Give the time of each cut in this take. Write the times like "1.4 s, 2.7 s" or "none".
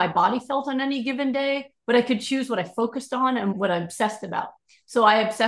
3.5 s